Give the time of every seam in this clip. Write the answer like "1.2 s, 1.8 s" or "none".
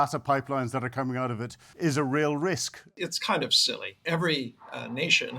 1.6 s, 2.9 s, 4.0 s